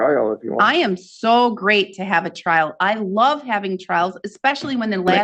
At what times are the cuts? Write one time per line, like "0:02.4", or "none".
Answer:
none